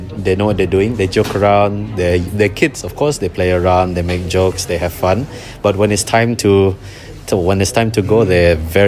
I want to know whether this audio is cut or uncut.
uncut